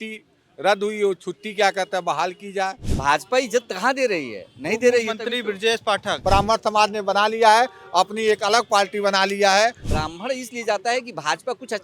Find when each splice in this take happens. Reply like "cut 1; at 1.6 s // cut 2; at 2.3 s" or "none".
cut 1; at 2.9 s // cut 2; at 6.2 s // cut 3; at 9.9 s